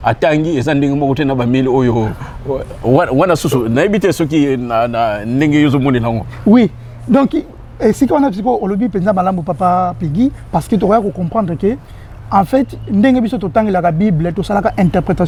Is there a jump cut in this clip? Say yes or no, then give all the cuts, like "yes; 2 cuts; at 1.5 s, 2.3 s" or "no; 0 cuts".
no; 0 cuts